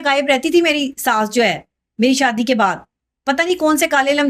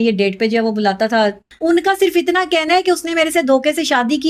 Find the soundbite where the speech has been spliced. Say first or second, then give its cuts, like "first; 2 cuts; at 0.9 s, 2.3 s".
second; 1 cut; at 1.4 s